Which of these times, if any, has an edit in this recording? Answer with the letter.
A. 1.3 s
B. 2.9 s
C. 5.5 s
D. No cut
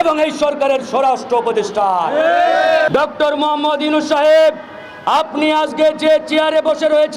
B